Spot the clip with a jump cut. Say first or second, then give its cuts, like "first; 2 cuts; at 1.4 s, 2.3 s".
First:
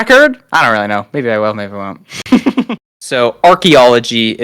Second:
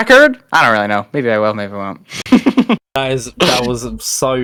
first; 1 cut; at 2.8 s